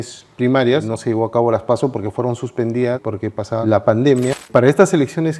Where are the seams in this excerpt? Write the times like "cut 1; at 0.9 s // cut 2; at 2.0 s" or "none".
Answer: cut 1; at 0.9 s // cut 2; at 3.1 s // cut 3; at 4.5 s

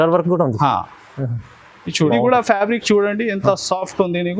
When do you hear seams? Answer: cut 1; at 2.1 s

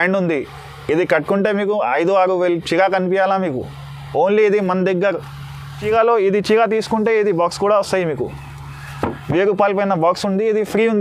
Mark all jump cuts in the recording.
cut 1; at 5.8 s

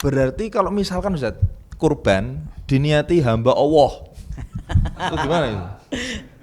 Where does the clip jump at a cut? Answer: none

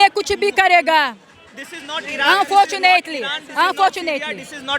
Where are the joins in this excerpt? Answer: none

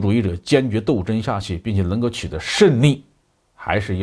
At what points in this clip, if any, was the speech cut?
none

